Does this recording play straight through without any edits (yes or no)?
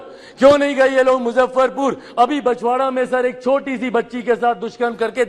yes